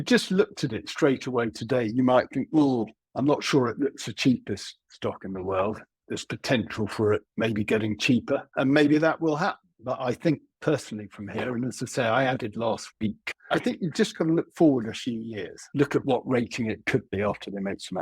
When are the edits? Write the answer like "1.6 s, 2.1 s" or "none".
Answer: 3.0 s, 13.3 s